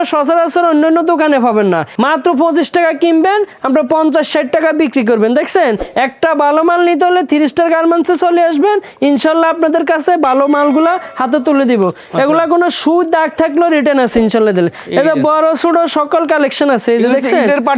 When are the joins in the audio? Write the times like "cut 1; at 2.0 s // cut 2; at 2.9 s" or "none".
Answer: cut 1; at 1.9 s // cut 2; at 5.9 s